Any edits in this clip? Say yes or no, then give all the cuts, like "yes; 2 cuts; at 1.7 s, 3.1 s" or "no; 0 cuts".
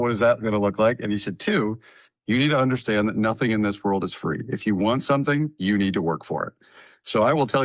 no; 0 cuts